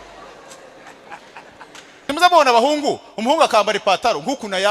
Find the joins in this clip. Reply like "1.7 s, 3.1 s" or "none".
2.1 s